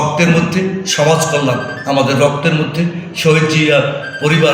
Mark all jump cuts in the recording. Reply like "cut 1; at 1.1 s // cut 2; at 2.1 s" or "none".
none